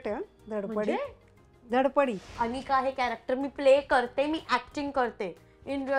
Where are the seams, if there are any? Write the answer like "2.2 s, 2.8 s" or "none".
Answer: 2.3 s